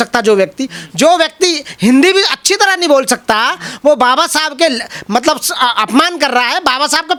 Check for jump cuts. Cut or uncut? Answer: uncut